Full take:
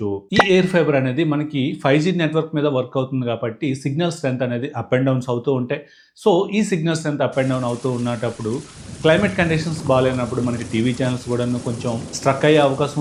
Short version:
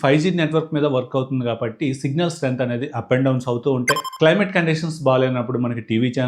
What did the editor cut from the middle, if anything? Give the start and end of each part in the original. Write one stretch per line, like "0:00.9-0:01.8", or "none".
0:05.9-0:08.9